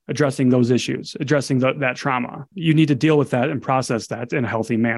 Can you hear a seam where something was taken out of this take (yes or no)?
yes